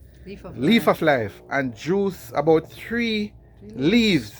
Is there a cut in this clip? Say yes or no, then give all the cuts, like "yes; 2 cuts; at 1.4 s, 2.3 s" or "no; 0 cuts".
no; 0 cuts